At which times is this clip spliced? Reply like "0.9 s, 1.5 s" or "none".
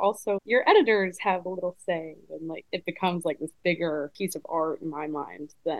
2.6 s, 4.1 s